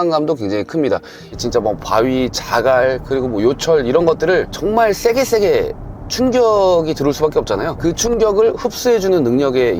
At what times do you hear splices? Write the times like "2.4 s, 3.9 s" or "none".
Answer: 1.4 s